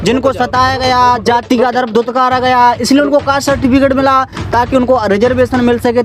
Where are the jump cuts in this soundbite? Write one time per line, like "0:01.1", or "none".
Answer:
none